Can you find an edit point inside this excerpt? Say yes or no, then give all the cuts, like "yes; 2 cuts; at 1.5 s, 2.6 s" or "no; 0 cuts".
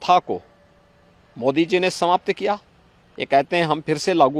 no; 0 cuts